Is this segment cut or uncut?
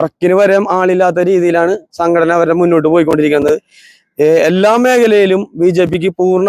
uncut